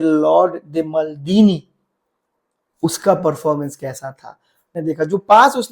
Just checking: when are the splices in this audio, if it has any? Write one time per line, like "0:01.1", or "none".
0:04.7